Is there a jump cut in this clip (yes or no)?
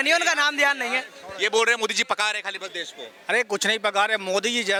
no